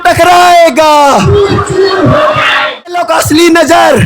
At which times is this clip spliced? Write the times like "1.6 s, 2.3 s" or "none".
3.0 s